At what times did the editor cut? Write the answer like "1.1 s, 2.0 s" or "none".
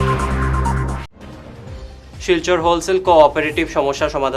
1.1 s